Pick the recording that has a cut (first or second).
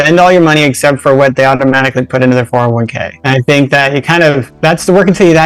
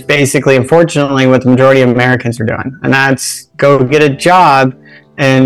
first